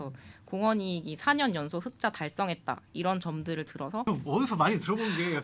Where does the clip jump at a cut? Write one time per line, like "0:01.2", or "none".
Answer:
0:04.1

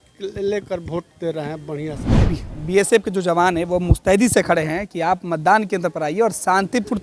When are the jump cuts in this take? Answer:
0:02.1

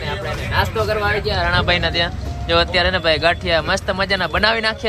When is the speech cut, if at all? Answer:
none

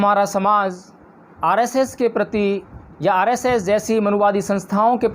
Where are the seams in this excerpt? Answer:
0:02.7

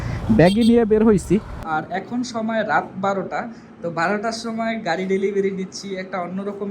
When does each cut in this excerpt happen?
0:01.7

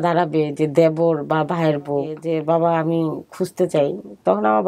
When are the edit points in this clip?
0:02.2

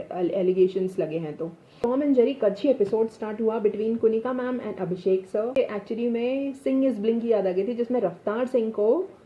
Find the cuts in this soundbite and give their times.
0:01.8
0:05.6

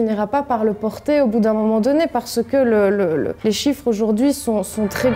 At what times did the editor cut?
none

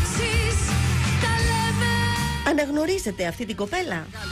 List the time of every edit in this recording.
0:02.2

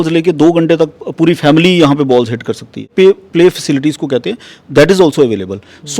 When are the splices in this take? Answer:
0:02.9

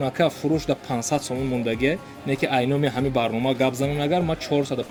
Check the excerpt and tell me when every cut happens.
none

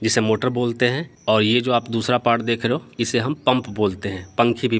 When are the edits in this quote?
0:01.1
0:03.5

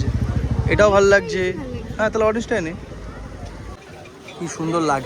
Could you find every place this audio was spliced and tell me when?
0:03.9

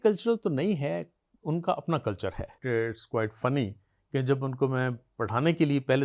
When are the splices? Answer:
0:02.6

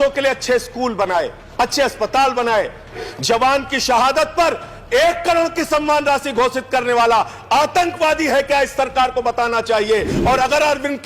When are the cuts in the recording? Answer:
0:01.4
0:03.0

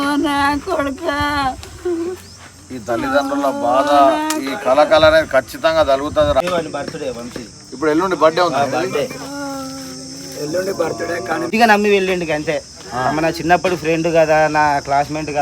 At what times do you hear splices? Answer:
0:06.4
0:11.5

